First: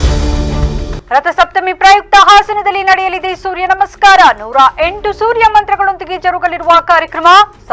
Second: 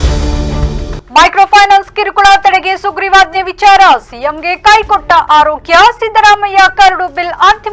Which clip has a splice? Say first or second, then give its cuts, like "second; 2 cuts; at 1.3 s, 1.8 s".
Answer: second; 1 cut; at 1.0 s